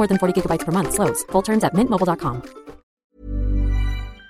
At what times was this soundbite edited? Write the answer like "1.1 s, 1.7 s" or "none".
2.9 s